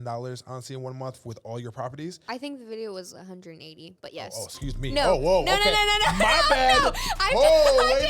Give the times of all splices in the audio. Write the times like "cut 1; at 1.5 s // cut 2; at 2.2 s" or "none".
cut 1; at 2.2 s